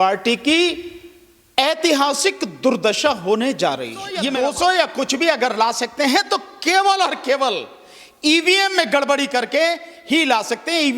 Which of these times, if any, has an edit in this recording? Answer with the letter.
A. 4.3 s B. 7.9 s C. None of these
A